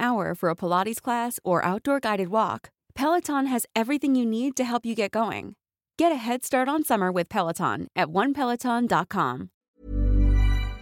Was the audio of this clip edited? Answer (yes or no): yes